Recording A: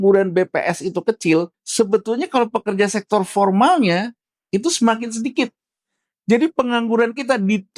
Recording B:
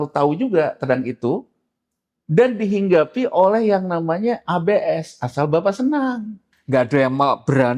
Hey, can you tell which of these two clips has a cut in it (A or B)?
A